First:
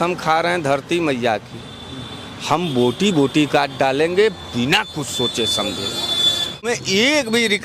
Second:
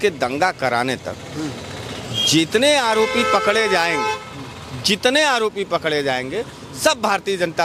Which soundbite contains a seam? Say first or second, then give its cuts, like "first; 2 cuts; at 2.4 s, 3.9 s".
first; 1 cut; at 6.7 s